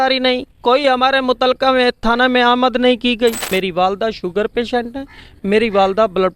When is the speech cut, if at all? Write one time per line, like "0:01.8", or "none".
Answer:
0:03.4